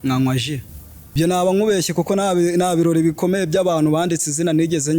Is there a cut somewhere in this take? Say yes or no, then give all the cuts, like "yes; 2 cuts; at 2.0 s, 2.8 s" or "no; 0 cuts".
yes; 1 cut; at 1.1 s